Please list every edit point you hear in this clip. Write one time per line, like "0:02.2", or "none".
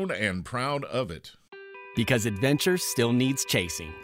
0:01.2